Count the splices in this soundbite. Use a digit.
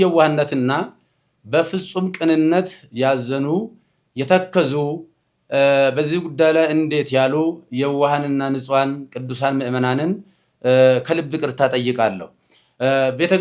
0